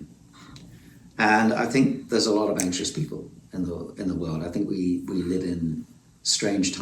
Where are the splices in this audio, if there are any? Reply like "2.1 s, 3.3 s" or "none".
none